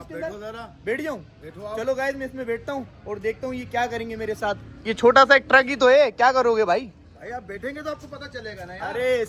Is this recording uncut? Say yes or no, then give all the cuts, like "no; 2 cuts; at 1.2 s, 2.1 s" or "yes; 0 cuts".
yes; 0 cuts